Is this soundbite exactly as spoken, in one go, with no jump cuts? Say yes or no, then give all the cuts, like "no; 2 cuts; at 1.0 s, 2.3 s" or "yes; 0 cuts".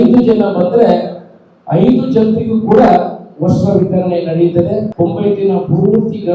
no; 1 cut; at 4.9 s